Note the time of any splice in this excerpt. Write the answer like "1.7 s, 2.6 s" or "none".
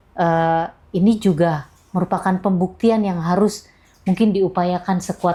none